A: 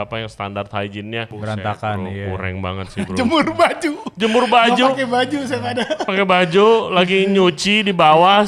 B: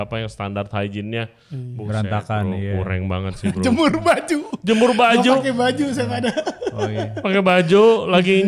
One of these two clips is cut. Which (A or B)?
A